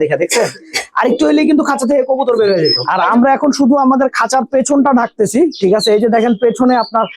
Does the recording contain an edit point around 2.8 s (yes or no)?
yes